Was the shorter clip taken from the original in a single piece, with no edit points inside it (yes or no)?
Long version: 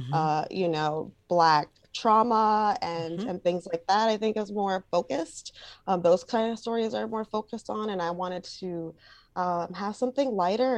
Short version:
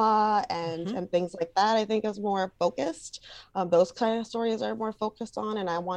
yes